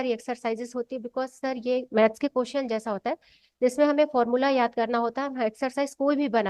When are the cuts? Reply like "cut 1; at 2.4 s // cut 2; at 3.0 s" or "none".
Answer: none